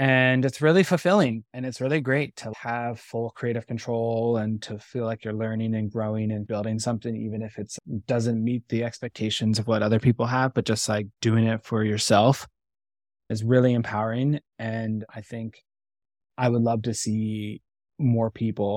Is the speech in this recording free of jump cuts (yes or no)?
yes